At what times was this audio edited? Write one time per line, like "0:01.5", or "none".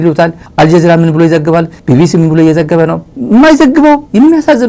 0:03.1